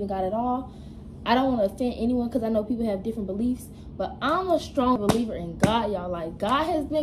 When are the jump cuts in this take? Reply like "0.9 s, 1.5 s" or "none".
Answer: 5.0 s